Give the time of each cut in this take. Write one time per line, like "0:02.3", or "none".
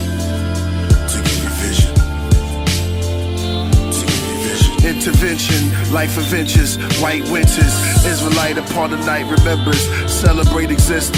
none